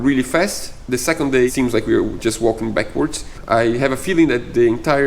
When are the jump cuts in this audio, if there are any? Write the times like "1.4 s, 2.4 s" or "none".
1.5 s, 3.3 s